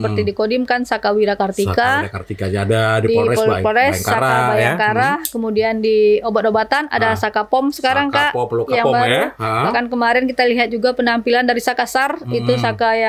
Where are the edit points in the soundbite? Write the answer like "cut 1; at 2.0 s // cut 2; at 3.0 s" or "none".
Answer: none

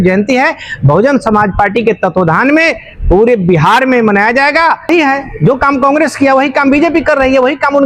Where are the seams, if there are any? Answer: cut 1; at 4.9 s

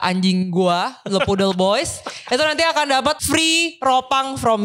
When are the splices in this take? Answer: cut 1; at 3.2 s

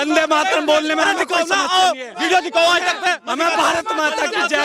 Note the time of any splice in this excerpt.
none

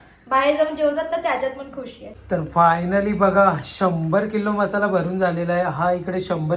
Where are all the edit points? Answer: cut 1; at 2.3 s

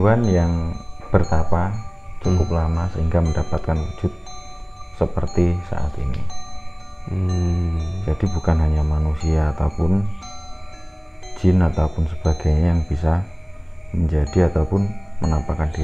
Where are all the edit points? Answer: none

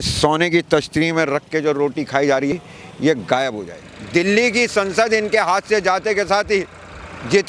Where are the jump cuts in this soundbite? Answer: cut 1; at 2.5 s // cut 2; at 3.6 s

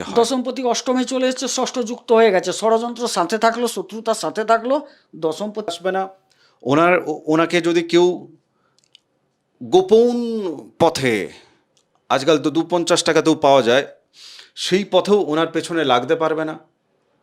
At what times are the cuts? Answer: cut 1; at 5.7 s

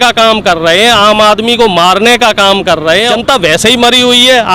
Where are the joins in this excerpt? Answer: cut 1; at 3.1 s

